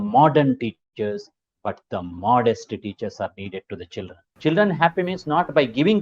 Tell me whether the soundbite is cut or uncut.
cut